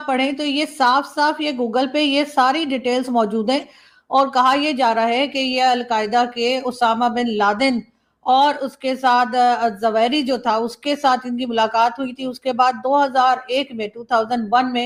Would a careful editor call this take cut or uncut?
uncut